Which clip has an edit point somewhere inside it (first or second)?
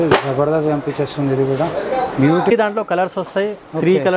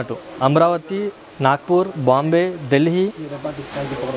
first